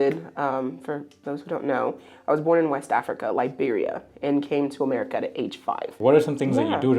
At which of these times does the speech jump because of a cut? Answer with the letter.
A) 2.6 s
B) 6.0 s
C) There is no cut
B